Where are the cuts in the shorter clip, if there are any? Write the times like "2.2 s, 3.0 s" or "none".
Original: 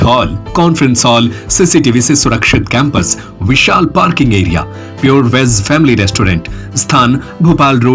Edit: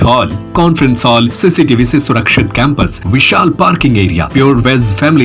1.3 s, 3.0 s, 4.2 s

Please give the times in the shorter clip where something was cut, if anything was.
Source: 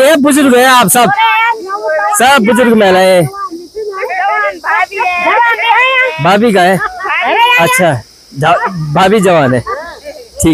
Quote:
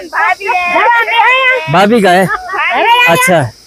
none

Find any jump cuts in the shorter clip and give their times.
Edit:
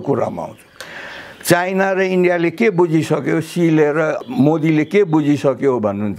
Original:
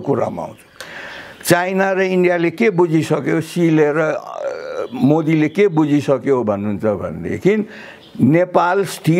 4.2 s

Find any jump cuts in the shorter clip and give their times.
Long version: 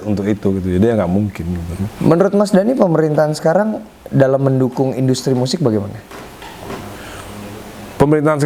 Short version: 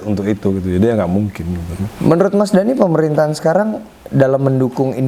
none

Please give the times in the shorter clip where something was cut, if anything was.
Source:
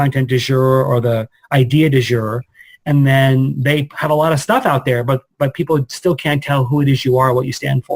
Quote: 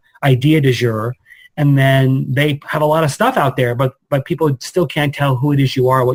none

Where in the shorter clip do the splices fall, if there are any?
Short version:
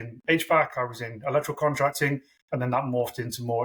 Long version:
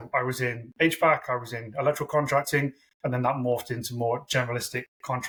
none

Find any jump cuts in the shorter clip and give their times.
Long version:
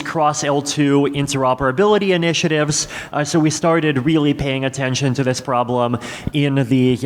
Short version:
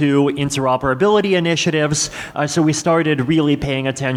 none

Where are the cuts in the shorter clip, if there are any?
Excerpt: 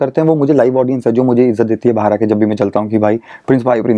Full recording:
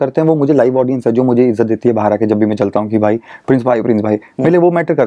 none

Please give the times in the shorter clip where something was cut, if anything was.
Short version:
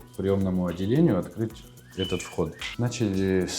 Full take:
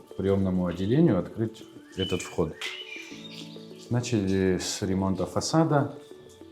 2.6 s

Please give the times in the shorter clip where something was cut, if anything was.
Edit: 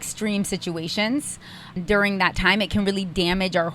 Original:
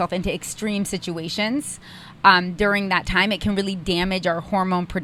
1.8 s

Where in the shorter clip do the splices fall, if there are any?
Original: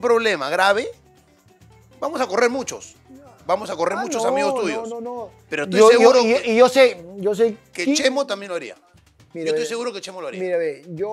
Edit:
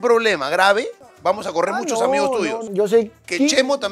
1.0 s, 2.6 s

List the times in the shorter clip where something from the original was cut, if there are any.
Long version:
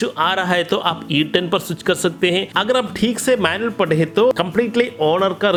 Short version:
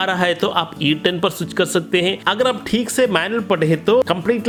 none

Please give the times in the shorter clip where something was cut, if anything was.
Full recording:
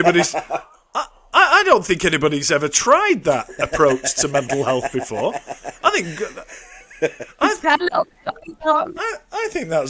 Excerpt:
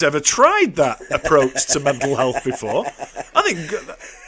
none

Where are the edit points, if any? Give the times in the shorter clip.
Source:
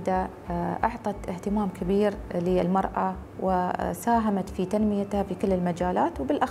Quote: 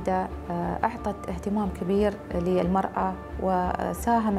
none

